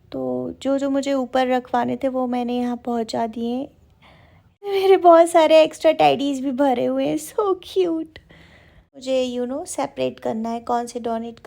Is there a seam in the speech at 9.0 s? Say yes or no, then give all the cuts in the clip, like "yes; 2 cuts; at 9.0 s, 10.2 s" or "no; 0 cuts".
yes; 2 cuts; at 4.7 s, 9.0 s